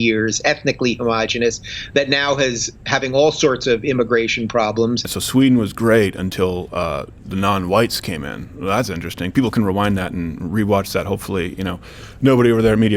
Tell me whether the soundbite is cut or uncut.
cut